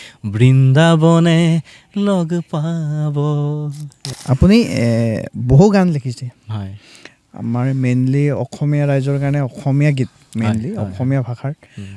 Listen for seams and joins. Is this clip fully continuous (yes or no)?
no